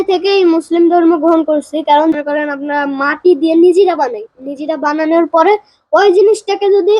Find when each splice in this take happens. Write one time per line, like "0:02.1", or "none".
0:02.1